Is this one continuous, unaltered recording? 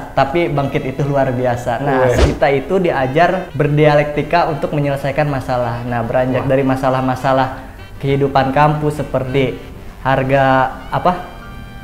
no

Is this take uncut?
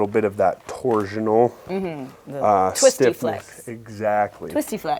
yes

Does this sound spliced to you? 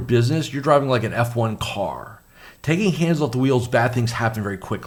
no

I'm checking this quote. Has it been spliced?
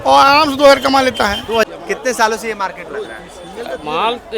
yes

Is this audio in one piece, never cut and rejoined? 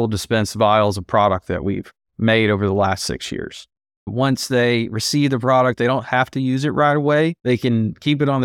no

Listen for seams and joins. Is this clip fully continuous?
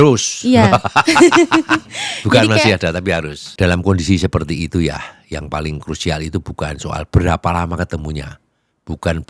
no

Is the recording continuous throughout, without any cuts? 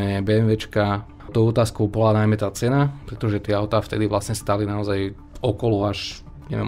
no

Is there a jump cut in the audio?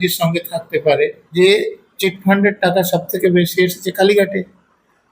yes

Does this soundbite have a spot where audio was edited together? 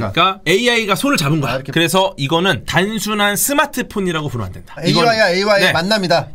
yes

